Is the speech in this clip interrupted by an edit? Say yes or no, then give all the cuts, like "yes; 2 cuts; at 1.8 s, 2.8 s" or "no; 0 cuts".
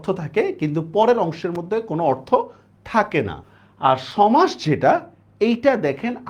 yes; 1 cut; at 3.4 s